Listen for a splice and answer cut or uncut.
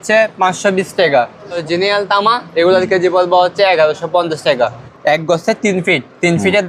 cut